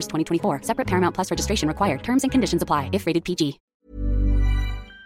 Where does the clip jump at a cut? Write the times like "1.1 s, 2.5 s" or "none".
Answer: 3.8 s